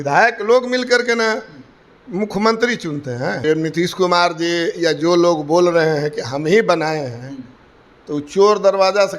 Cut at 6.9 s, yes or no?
no